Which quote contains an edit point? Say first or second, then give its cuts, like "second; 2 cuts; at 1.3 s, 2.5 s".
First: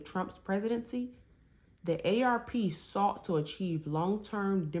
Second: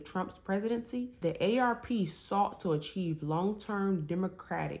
second; 1 cut; at 1.1 s